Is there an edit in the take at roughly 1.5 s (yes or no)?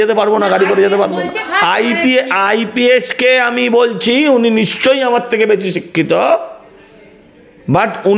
yes